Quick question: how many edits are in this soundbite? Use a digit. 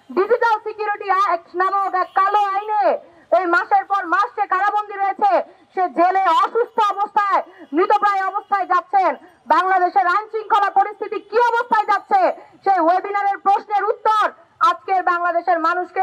0